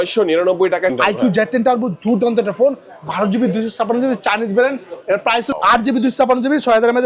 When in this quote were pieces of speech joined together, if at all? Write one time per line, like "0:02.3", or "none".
0:01.0
0:05.5